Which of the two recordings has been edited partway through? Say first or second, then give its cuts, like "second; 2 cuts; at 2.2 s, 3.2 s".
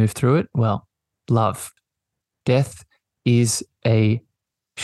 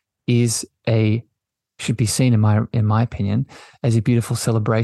first; 1 cut; at 1.7 s